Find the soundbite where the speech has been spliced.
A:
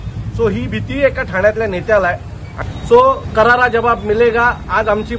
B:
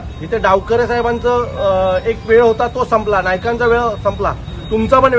A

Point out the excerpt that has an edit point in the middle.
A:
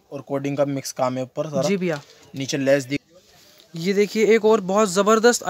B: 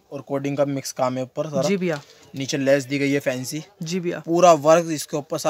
A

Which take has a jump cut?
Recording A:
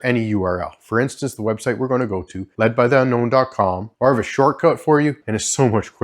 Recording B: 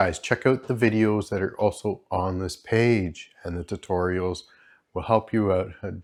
A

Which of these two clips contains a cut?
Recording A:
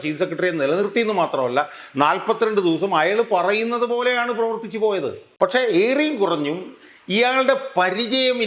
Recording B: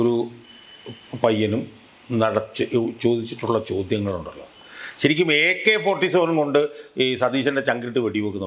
A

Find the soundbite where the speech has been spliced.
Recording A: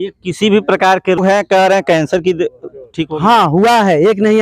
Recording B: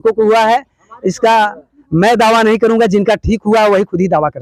A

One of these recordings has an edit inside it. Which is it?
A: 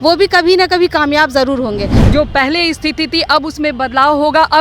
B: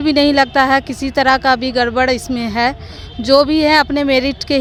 A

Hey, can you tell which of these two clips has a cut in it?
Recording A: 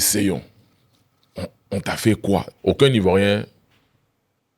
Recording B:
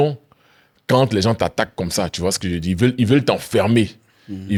A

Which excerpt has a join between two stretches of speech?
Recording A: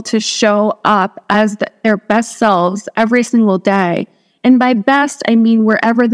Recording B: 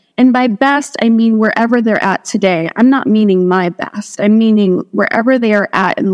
A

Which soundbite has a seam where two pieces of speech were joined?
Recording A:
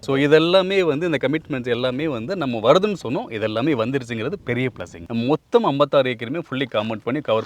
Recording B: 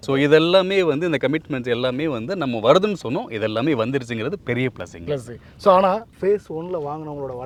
A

